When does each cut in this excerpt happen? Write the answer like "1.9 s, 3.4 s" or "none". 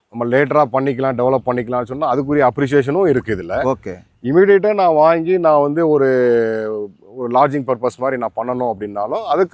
none